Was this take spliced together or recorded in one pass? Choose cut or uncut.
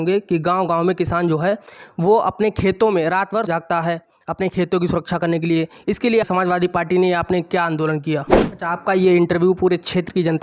cut